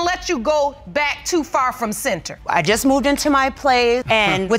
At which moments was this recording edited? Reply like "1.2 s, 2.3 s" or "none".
2.4 s